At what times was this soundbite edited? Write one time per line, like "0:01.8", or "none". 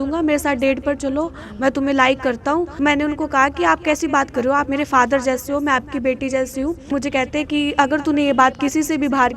0:02.7
0:06.9